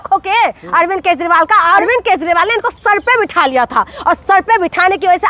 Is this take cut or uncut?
cut